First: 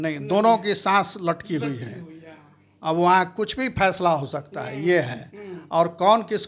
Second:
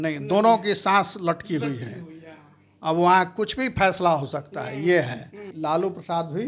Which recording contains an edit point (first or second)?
second